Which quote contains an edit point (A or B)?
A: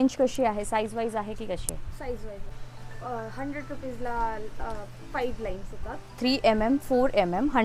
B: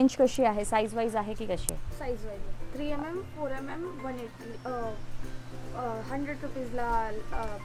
A